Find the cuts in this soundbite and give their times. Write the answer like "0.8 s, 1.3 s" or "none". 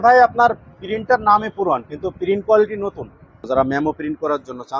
3.4 s

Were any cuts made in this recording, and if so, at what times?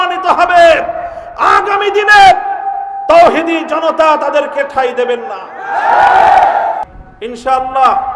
6.9 s

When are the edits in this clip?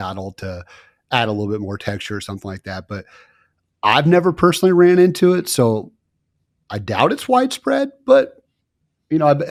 none

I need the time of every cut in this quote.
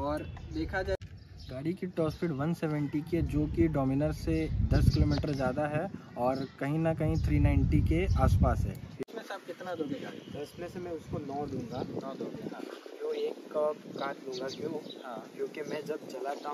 1.2 s, 9.0 s

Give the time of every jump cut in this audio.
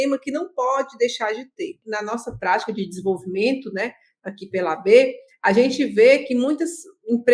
1.8 s

